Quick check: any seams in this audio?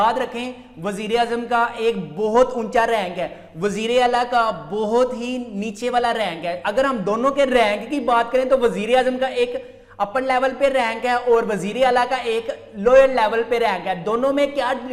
no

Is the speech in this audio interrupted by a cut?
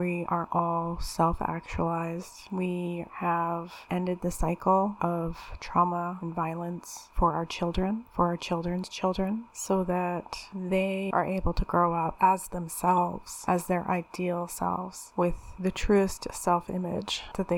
no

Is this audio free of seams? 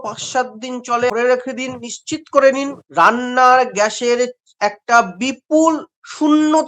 no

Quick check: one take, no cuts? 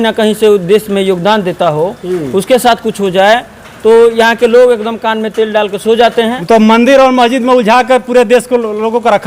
no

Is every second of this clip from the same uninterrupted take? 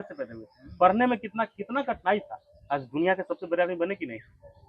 yes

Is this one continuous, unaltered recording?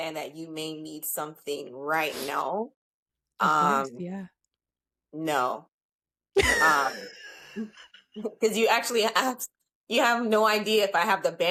yes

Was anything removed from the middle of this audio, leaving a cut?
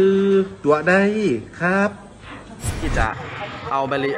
yes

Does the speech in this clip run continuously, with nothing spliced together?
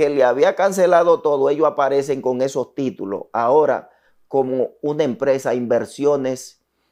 yes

